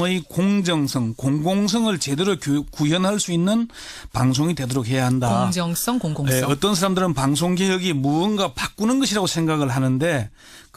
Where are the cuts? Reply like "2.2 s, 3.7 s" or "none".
none